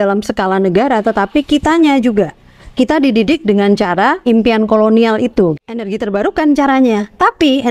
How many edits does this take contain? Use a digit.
2